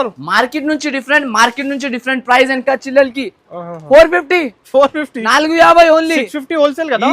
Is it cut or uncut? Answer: cut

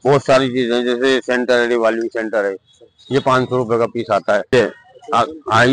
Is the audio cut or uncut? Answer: cut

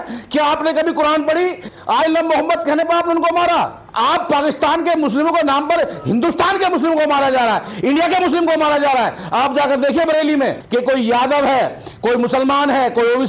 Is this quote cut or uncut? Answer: cut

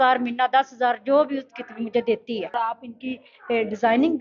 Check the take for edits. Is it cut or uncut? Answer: cut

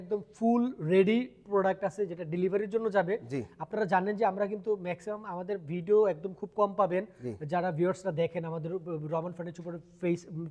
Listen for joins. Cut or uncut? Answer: uncut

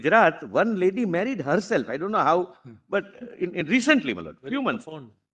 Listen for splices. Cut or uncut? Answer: uncut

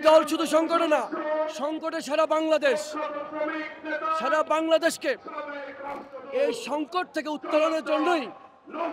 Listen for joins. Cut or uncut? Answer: uncut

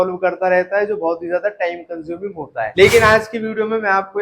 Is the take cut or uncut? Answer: cut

